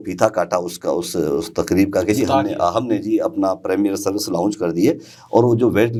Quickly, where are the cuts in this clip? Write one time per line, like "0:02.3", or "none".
none